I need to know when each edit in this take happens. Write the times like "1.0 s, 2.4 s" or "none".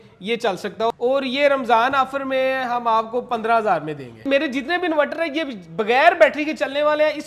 0.9 s, 4.2 s